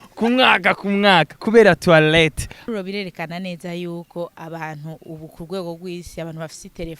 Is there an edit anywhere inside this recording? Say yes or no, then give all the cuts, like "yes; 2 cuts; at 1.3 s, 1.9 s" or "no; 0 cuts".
yes; 1 cut; at 2.6 s